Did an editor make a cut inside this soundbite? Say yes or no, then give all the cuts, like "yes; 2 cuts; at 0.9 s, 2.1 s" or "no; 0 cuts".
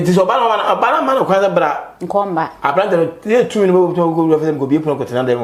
no; 0 cuts